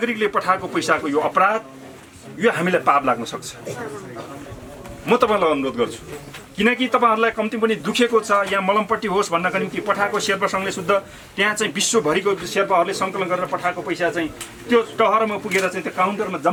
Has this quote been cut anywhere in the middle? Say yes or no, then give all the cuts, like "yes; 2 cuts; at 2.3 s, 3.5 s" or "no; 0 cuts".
no; 0 cuts